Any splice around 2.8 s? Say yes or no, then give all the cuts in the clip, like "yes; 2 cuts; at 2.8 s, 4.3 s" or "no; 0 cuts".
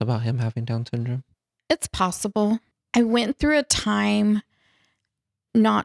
yes; 1 cut; at 2.8 s